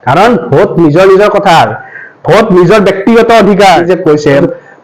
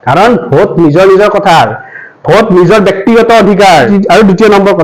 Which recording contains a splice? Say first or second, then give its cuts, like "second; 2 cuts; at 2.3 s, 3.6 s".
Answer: first; 1 cut; at 3.8 s